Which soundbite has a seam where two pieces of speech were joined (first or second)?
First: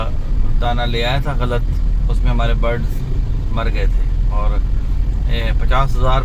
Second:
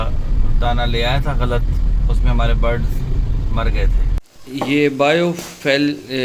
second